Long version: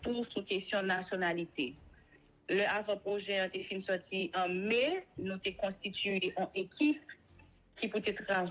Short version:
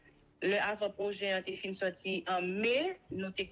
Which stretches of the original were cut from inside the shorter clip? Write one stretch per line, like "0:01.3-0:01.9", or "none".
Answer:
none